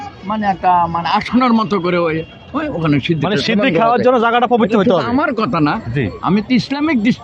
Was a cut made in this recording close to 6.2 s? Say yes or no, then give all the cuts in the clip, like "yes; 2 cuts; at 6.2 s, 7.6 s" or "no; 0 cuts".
no; 0 cuts